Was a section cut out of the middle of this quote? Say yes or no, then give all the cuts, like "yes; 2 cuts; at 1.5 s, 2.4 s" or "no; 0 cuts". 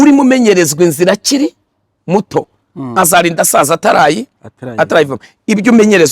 no; 0 cuts